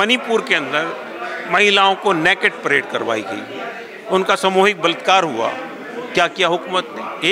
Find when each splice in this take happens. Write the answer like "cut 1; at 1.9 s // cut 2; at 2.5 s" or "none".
none

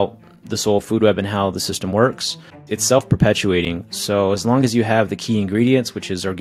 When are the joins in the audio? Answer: cut 1; at 2.6 s

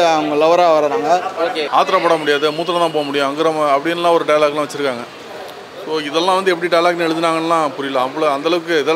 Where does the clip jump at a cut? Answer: cut 1; at 1.6 s

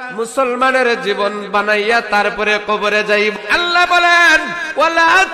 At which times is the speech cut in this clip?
cut 1; at 3.3 s

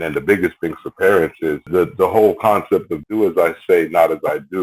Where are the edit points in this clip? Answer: cut 1; at 1.7 s // cut 2; at 3.0 s

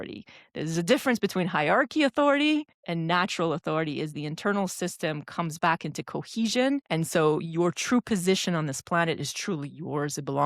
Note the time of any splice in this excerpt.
cut 1; at 2.8 s // cut 2; at 6.9 s

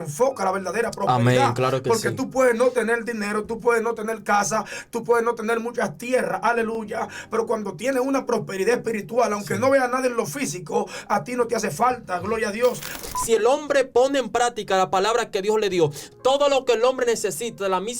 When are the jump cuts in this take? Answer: cut 1; at 13.0 s

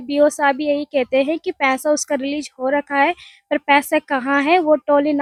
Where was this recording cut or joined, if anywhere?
none

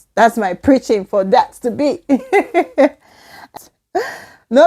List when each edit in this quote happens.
cut 1; at 3.4 s

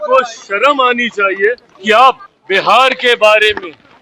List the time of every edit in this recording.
cut 1; at 1.7 s // cut 2; at 2.3 s

